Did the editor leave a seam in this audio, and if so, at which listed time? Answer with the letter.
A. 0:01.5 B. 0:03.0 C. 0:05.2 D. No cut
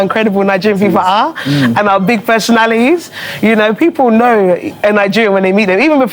D